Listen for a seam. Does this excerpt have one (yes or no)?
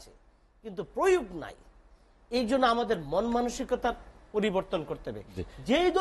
no